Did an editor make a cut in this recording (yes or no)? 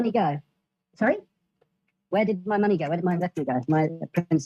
no